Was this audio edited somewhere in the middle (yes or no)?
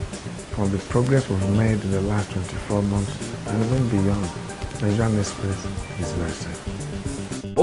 yes